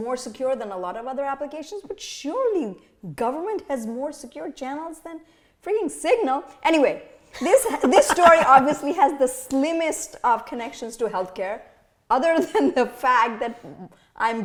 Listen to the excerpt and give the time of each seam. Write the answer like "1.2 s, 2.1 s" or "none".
none

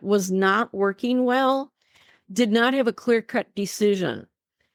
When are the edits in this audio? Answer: none

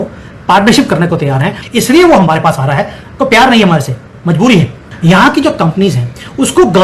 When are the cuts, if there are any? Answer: 1.5 s, 4.8 s

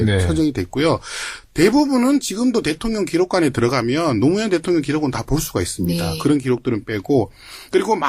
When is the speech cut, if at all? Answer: 2.3 s

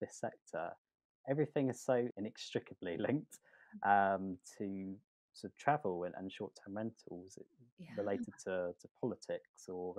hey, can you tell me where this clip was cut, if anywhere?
2.1 s

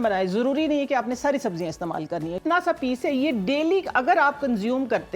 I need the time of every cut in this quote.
2.4 s

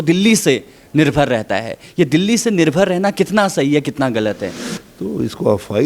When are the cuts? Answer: 4.5 s

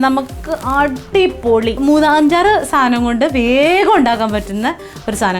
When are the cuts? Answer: 1.8 s

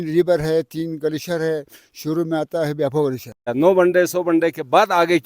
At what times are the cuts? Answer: 3.5 s

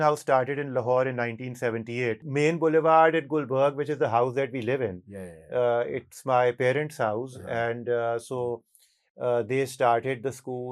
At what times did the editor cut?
2.2 s

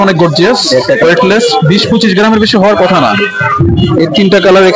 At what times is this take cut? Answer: 1.0 s

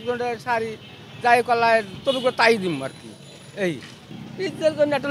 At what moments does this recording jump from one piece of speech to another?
none

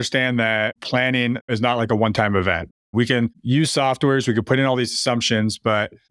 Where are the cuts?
1.2 s

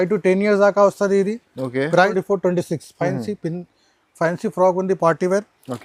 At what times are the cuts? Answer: 2.1 s

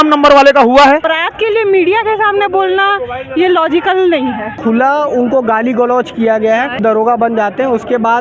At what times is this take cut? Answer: 1.2 s, 4.5 s, 6.8 s

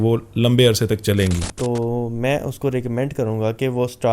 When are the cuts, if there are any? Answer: 1.5 s

